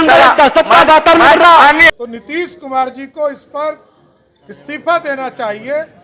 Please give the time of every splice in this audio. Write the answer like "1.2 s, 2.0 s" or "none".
1.9 s